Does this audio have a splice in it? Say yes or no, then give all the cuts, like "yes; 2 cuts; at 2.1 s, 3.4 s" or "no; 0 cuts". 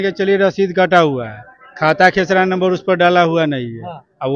no; 0 cuts